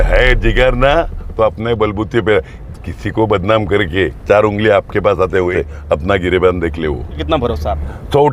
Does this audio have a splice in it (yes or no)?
yes